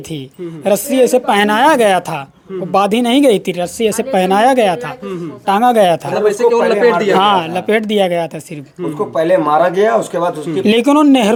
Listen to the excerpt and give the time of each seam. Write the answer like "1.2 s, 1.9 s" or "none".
none